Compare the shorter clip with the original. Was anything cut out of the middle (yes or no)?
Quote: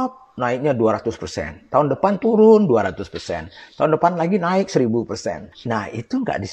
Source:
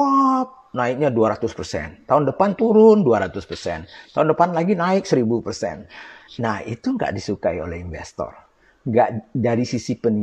yes